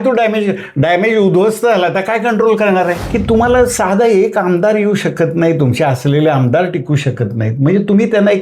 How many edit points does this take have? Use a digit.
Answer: 1